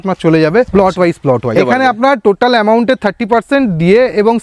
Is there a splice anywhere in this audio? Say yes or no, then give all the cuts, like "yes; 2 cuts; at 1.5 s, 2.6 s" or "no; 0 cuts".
yes; 1 cut; at 1.5 s